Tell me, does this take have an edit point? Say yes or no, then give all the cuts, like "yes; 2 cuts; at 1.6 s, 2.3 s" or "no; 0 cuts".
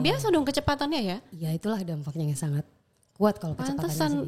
no; 0 cuts